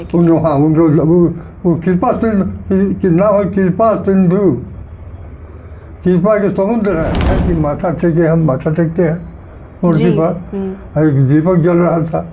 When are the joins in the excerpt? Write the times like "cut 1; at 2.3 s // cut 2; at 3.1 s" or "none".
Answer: cut 1; at 7.4 s